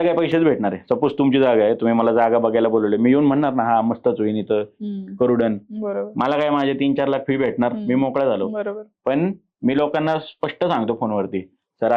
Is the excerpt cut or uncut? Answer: uncut